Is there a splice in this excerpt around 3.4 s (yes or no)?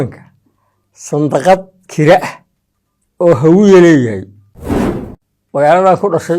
no